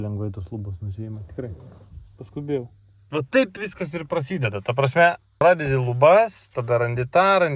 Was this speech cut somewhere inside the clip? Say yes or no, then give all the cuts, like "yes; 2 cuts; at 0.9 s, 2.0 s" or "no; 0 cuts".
yes; 2 cuts; at 3.1 s, 5.4 s